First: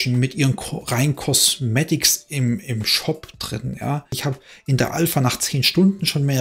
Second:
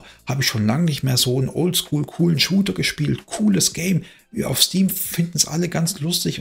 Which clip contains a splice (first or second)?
first